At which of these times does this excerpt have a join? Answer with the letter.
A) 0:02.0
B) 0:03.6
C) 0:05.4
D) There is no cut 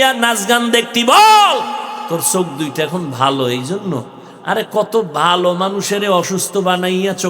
A